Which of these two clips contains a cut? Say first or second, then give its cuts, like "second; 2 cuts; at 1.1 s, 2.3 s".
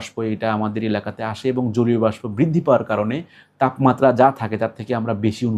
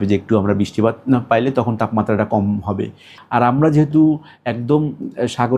second; 1 cut; at 3.1 s